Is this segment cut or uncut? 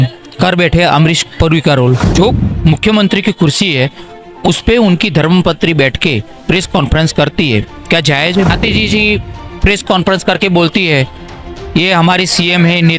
cut